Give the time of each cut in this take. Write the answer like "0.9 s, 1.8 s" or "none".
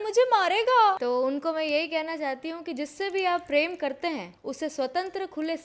1.0 s, 4.4 s